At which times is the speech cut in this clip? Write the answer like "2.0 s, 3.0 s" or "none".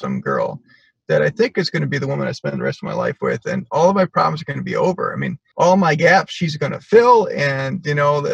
5.4 s